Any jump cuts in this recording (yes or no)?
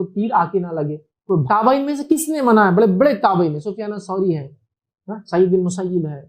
yes